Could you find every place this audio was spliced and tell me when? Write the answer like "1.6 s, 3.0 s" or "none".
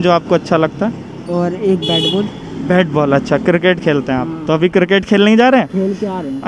none